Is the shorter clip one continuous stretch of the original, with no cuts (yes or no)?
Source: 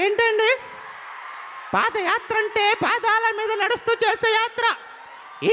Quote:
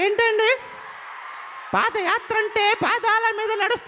yes